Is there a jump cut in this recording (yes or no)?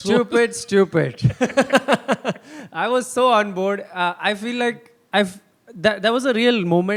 no